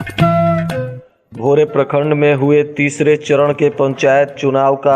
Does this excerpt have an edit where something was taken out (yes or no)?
yes